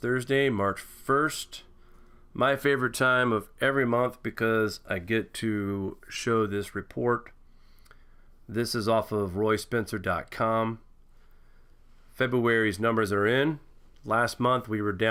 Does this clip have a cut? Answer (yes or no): no